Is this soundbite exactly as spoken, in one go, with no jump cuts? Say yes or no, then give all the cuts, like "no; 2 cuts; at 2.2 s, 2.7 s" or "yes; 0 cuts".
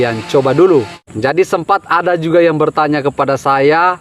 no; 1 cut; at 1.0 s